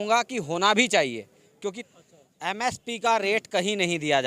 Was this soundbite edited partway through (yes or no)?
yes